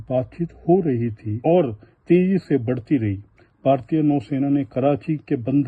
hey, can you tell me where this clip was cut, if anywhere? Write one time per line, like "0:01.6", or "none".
0:01.4